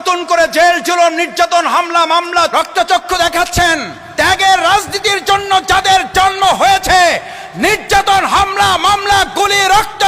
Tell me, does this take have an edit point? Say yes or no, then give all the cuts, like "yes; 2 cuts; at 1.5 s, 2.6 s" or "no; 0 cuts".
yes; 2 cuts; at 2.5 s, 4.0 s